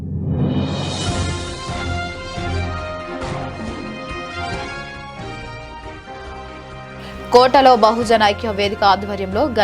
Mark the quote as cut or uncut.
cut